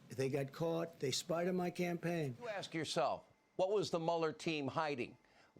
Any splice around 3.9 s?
no; 1 cut; at 2.7 s

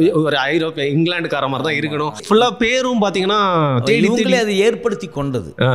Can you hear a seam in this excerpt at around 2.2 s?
yes; 1 cut; at 2.2 s

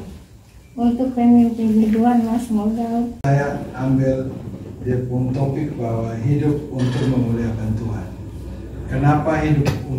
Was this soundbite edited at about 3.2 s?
yes; 1 cut; at 3.2 s

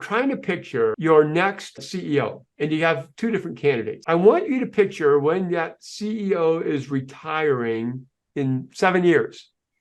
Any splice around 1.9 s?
yes; 3 cuts; at 0.9 s, 1.9 s, 3.9 s

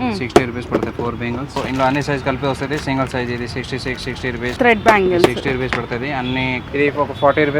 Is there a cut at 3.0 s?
no; 3 cuts; at 1.6 s, 4.5 s, 6.6 s

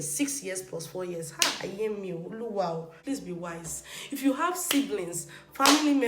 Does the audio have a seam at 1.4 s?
no; 1 cut; at 2.8 s

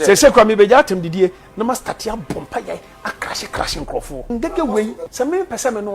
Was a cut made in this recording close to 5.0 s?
yes; 2 cuts; at 4.3 s, 5.0 s

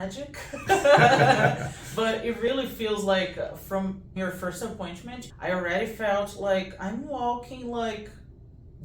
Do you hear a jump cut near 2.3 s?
no; 2 cuts; at 4.2 s, 5.2 s

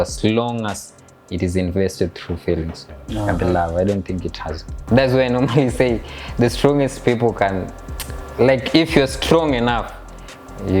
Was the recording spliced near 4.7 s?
yes; 1 cut; at 4.7 s

